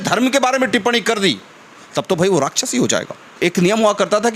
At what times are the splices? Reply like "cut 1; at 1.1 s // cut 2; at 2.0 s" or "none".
cut 1; at 3.4 s

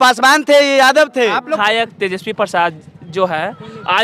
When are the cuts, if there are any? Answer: cut 1; at 1.6 s

